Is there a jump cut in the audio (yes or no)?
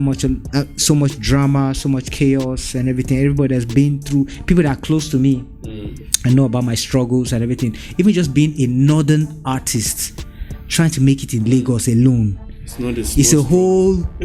no